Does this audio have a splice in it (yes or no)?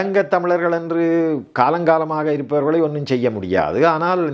no